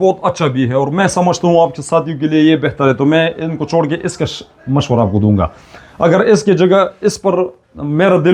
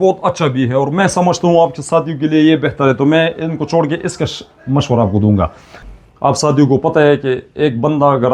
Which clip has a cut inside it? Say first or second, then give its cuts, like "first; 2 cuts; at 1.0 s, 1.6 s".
second; 1 cut; at 5.8 s